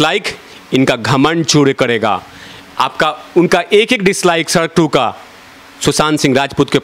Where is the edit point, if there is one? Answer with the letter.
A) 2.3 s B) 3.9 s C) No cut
C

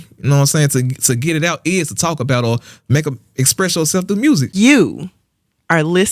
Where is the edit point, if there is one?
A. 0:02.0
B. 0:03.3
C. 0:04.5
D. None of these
C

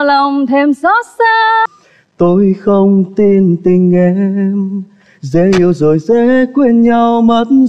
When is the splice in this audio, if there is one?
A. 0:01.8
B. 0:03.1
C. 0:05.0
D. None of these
A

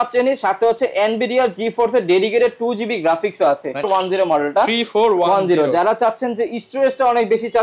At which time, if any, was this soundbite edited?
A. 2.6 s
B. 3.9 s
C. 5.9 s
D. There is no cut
B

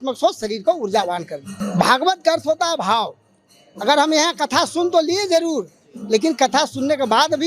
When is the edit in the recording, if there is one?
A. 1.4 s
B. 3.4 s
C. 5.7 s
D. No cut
A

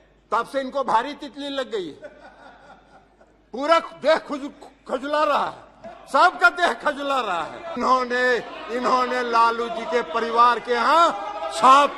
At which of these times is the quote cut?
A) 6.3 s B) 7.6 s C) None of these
B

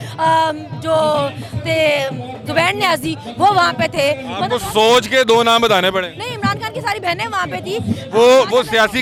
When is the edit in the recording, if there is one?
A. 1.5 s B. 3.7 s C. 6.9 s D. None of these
D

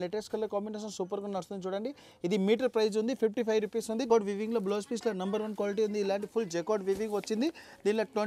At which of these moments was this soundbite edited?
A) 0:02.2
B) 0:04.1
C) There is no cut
B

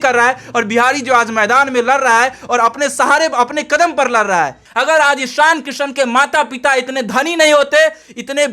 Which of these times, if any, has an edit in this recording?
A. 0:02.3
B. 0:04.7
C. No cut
B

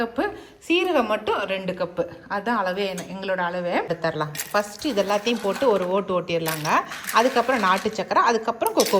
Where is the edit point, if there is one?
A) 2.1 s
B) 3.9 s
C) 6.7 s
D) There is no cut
B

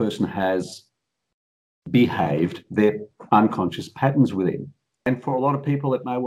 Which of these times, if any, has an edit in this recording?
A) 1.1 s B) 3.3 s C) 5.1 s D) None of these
C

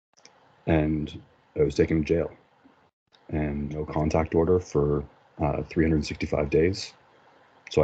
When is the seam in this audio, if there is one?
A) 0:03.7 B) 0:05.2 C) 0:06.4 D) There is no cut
A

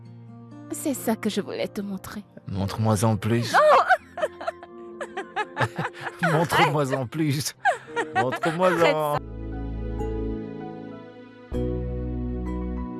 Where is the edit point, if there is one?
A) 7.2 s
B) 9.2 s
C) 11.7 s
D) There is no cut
B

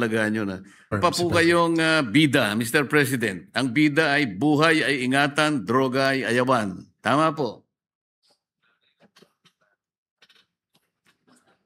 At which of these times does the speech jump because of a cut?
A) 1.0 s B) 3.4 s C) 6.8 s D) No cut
A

